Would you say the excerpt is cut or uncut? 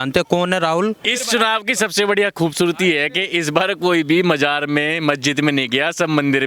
cut